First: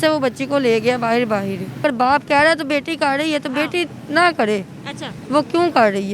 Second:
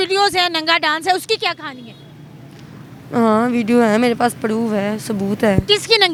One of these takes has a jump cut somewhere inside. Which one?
first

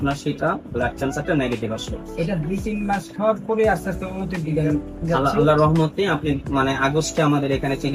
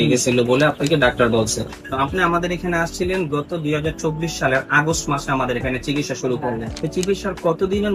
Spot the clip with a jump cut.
second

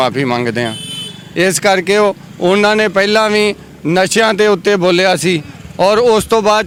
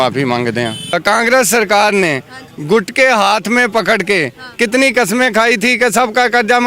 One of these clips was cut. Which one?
second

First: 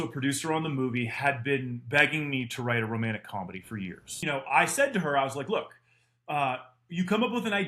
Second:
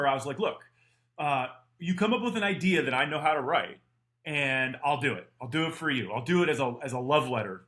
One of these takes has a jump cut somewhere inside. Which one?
first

